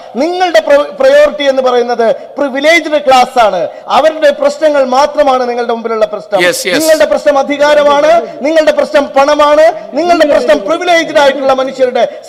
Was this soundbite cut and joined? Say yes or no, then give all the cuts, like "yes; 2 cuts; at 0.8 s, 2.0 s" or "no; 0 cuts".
no; 0 cuts